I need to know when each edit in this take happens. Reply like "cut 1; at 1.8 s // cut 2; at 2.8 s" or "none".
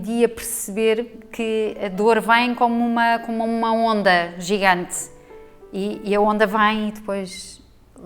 cut 1; at 1.1 s

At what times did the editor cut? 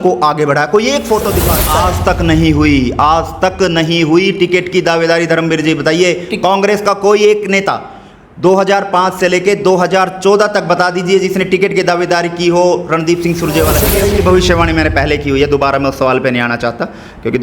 cut 1; at 1.5 s // cut 2; at 13.8 s

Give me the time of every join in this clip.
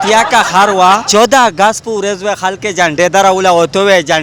cut 1; at 1.0 s

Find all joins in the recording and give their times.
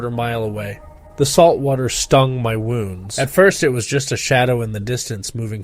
cut 1; at 3.0 s

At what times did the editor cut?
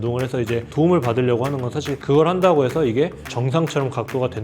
cut 1; at 2.0 s

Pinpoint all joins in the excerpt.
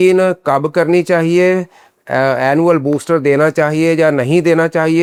none

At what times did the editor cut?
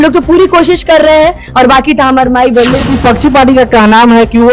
cut 1; at 2.8 s

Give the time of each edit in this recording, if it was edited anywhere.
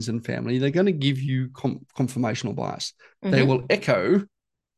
none

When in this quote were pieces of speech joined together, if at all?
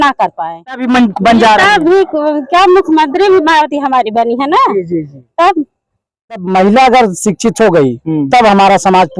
cut 1; at 0.8 s // cut 2; at 6.4 s

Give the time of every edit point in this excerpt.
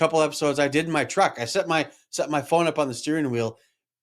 none

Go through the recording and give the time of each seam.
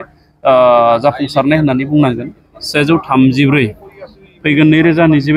cut 1; at 2.3 s

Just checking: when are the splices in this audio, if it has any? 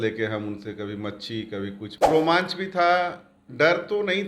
cut 1; at 1.9 s

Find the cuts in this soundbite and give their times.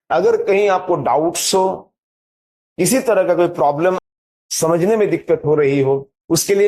cut 1; at 4.2 s

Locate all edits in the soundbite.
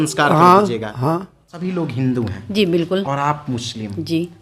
cut 1; at 1.5 s

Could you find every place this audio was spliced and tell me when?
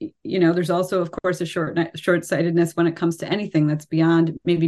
none

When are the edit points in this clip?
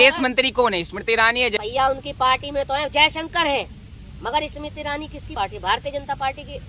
cut 1; at 1.6 s // cut 2; at 5.3 s

